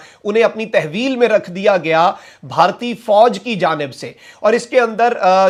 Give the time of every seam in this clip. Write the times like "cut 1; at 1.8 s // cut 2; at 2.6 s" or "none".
none